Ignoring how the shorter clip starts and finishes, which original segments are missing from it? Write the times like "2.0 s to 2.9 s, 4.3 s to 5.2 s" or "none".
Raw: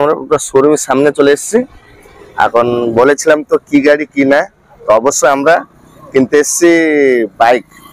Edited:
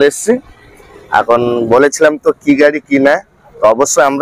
none